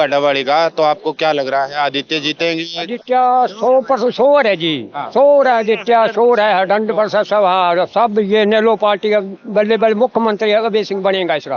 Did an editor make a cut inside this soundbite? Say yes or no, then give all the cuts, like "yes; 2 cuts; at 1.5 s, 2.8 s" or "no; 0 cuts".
no; 0 cuts